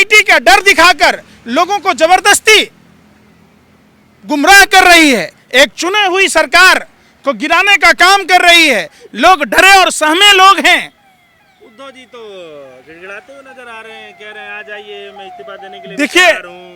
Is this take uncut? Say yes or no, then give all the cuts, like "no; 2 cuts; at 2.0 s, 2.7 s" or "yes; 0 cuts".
yes; 0 cuts